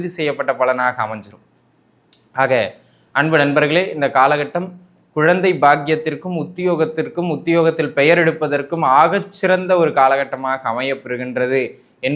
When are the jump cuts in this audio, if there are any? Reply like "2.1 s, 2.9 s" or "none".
none